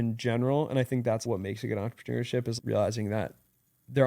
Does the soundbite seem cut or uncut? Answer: cut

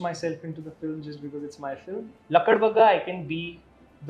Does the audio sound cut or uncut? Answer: cut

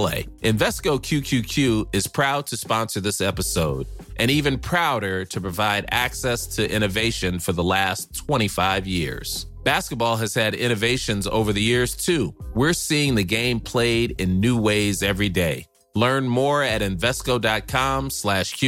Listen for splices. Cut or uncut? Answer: uncut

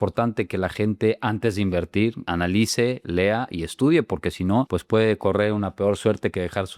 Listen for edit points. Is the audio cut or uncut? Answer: uncut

